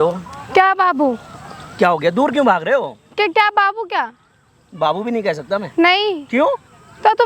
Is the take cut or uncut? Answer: uncut